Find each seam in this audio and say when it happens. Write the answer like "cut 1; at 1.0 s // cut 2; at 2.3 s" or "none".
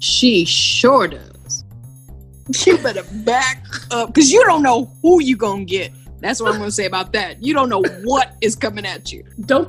cut 1; at 1.9 s